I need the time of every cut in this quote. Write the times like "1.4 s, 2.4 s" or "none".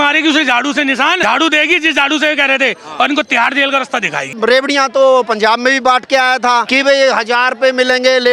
1.2 s, 4.4 s, 6.7 s